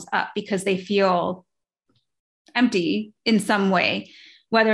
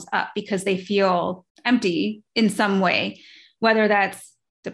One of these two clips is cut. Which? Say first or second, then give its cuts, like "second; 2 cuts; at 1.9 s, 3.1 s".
second; 1 cut; at 1.5 s